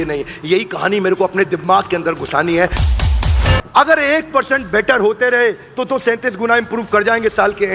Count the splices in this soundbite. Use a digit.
1